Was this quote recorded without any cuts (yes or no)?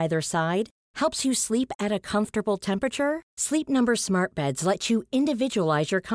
yes